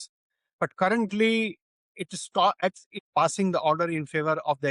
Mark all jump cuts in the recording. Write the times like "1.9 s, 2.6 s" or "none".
2.6 s

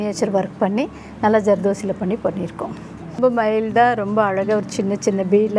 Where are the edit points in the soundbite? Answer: 3.2 s

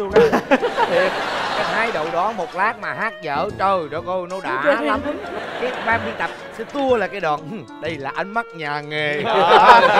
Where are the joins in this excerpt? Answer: none

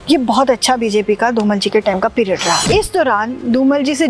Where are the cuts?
2.6 s

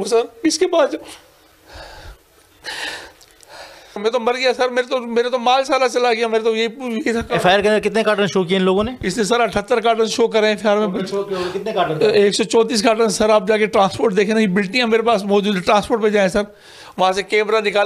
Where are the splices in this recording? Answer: 4.0 s

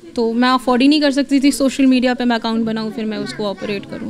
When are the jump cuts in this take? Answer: none

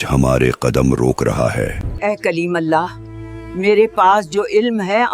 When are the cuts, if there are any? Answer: 1.9 s

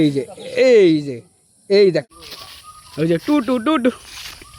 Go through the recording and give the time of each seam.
2.2 s

